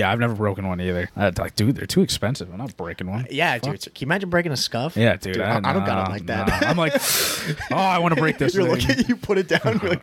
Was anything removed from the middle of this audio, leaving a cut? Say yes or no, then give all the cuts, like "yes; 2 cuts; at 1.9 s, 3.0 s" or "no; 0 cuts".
yes; 1 cut; at 1.1 s